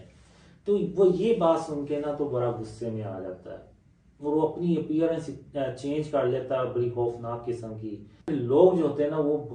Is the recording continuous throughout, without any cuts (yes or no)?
no